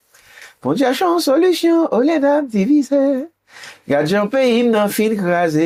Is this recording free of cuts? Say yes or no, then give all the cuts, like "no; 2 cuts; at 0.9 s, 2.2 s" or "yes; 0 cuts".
yes; 0 cuts